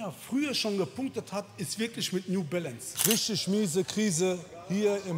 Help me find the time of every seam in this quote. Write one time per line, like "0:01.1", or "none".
0:02.9